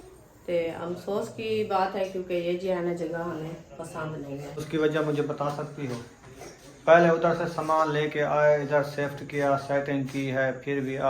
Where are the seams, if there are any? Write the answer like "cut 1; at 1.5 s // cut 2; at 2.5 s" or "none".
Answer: cut 1; at 4.6 s